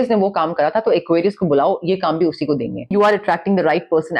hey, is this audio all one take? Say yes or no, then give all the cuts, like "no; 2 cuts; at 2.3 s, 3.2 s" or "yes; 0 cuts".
no; 1 cut; at 2.9 s